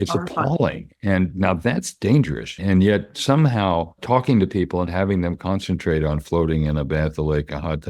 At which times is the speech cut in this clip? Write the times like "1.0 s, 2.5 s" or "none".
2.6 s, 4.0 s

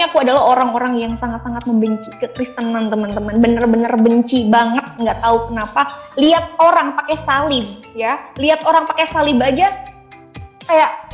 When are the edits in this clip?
none

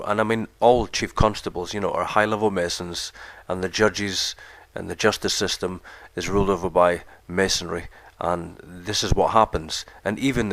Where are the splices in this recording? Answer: 4.7 s

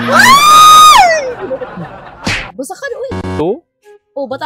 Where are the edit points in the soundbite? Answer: 2.5 s

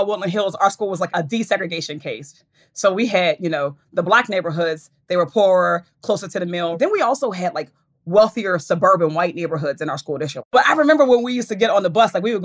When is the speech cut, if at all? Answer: 6.7 s, 10.5 s

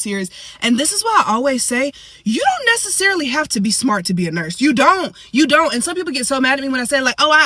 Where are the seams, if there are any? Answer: none

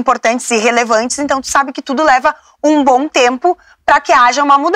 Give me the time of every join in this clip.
none

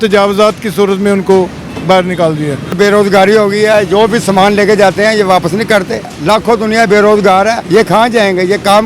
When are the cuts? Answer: 2.8 s, 6.1 s, 7.6 s

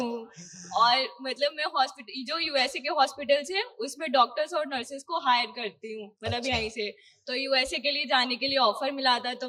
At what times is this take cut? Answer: none

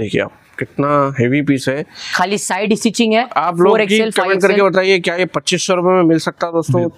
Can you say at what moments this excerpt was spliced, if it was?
none

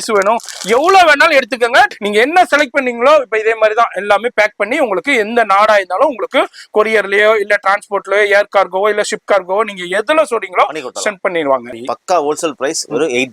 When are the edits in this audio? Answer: 1.9 s, 11.7 s

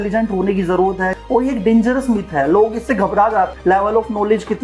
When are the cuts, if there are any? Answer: 1.1 s, 3.5 s

